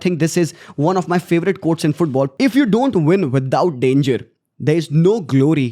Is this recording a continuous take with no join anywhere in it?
no; 1 cut; at 2.3 s

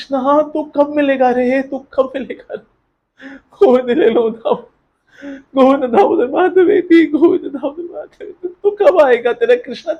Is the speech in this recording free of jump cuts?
yes; 0 cuts

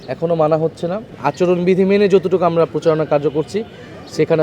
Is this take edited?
yes; 1 cut; at 1.1 s

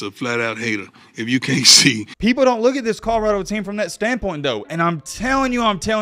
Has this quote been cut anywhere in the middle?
yes; 1 cut; at 2.1 s

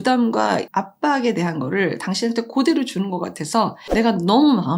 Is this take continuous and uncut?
no; 1 cut; at 3.8 s

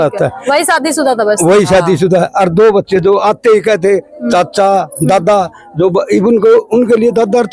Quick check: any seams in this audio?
no; 0 cuts

